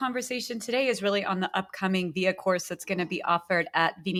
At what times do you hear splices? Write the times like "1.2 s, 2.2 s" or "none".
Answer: none